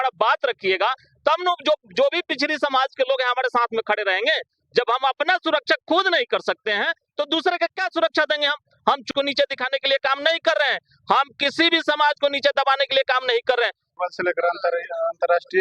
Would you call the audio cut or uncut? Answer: cut